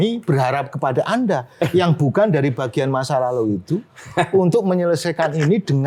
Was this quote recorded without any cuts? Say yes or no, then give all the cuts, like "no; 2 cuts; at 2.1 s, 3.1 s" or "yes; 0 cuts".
yes; 0 cuts